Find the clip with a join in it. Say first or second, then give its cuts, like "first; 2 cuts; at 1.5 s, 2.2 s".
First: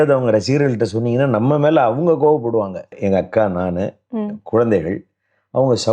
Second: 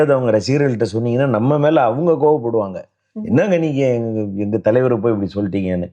first; 1 cut; at 3.0 s